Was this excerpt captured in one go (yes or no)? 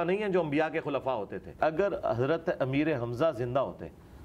no